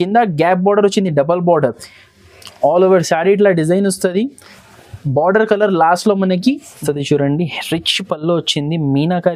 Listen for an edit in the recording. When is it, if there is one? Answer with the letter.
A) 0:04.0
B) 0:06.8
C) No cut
B